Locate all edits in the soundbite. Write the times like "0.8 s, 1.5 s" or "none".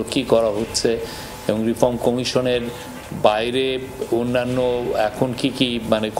none